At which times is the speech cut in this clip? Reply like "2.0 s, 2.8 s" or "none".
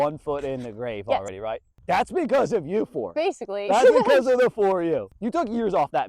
1.3 s, 5.1 s